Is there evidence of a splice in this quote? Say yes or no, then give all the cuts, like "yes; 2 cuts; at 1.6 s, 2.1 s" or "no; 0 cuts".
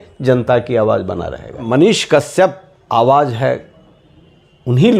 yes; 2 cuts; at 1.6 s, 2.7 s